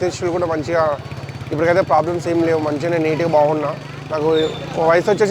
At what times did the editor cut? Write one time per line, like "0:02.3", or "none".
none